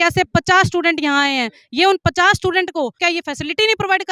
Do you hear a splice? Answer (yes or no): yes